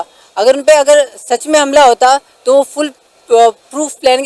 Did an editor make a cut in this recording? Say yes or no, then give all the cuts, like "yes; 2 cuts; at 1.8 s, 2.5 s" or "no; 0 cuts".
no; 0 cuts